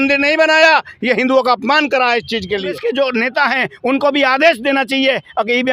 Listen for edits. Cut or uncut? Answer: cut